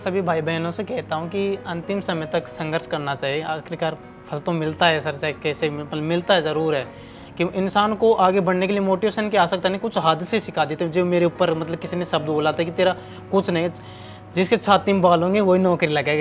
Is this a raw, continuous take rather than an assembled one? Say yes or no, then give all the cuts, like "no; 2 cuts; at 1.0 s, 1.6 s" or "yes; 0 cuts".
yes; 0 cuts